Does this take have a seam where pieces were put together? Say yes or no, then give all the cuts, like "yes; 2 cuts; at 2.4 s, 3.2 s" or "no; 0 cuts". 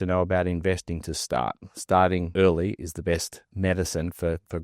yes; 2 cuts; at 2.3 s, 3.5 s